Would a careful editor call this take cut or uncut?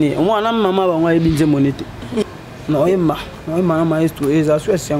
cut